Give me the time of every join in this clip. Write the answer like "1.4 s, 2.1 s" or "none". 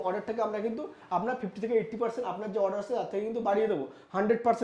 none